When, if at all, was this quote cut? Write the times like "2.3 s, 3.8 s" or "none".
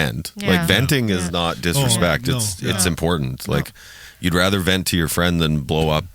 none